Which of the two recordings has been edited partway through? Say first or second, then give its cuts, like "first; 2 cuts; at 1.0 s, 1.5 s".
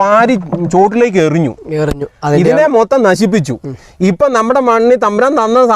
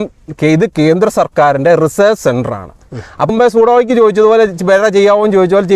second; 1 cut; at 3.3 s